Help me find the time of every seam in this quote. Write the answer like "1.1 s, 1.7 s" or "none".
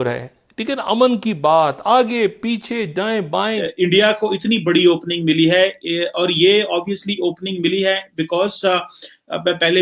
3.7 s